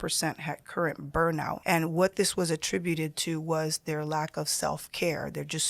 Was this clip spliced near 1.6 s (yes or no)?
yes